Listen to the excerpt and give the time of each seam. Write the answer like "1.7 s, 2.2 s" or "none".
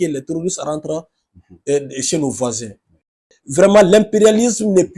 3.4 s

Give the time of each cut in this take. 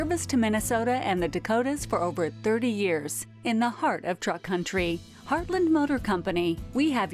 none

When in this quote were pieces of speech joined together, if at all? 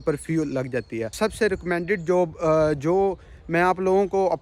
1.2 s

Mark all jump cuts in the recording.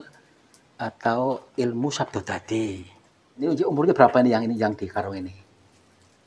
3.5 s

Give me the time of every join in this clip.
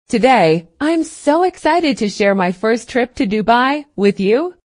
none

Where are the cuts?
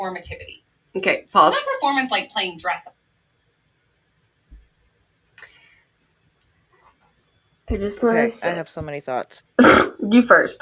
none

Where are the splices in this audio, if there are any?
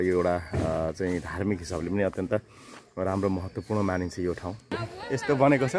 4.6 s

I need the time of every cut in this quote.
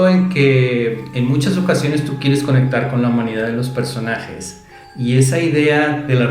1.1 s

